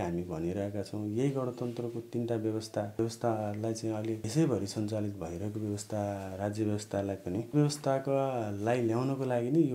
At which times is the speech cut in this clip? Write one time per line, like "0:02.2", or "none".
0:03.0
0:04.3
0:07.5